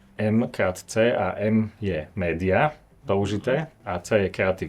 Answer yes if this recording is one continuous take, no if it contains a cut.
no